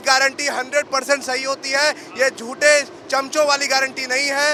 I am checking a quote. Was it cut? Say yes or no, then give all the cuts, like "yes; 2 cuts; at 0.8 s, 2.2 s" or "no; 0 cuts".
no; 0 cuts